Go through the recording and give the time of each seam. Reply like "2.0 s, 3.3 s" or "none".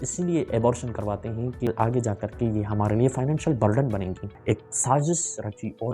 1.7 s, 4.3 s